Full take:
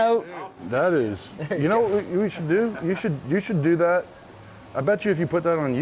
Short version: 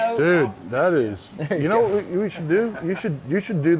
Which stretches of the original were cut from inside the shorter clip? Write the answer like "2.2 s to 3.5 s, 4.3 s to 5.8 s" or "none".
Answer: none